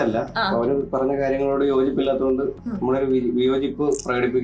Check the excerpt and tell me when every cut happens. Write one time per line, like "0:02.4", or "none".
none